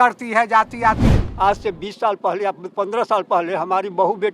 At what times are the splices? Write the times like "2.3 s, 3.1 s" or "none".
1.0 s

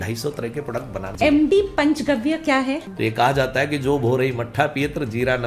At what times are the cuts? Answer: 1.0 s, 2.9 s

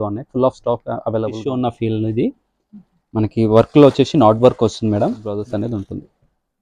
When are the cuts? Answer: 1.4 s, 5.3 s

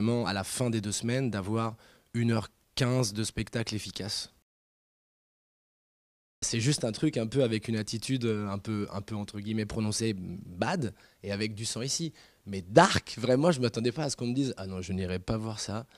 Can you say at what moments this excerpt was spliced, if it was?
14.2 s

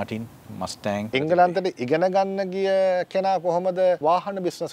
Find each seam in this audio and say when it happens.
1.1 s, 4.0 s

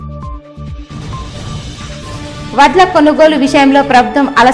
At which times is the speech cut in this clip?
none

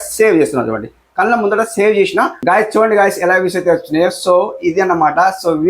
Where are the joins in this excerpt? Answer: 2.4 s

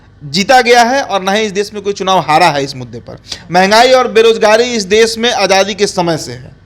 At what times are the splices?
none

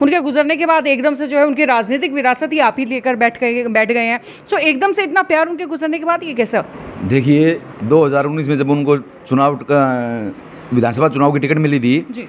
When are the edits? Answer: none

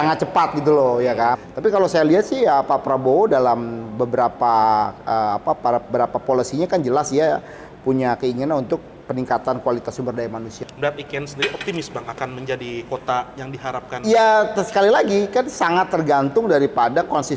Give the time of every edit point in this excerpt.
1.5 s, 10.6 s

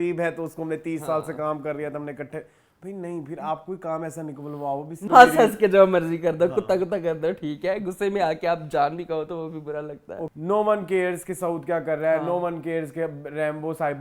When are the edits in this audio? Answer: 5.0 s, 10.3 s

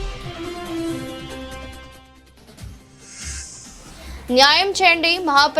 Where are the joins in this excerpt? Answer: 1.5 s, 4.0 s

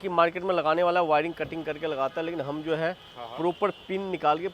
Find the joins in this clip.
none

